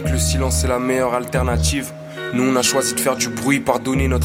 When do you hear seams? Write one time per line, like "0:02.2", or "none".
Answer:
none